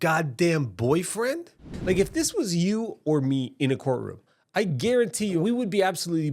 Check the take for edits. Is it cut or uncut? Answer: cut